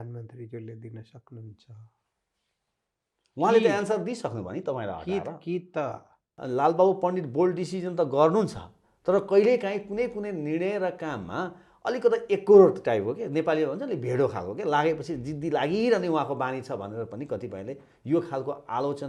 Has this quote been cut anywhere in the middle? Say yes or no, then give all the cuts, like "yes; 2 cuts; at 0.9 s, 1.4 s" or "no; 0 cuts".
yes; 1 cut; at 6.3 s